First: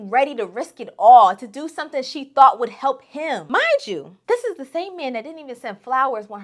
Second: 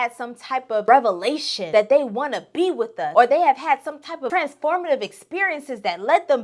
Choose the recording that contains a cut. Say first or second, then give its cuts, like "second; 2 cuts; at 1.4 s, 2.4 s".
second; 4 cuts; at 0.8 s, 1.5 s, 3.0 s, 4.2 s